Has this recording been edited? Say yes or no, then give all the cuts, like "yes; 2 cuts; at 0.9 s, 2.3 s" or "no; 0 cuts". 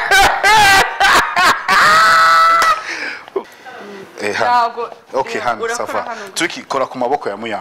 yes; 1 cut; at 3.5 s